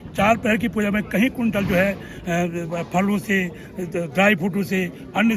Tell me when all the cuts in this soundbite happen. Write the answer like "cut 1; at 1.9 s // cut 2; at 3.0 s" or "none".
none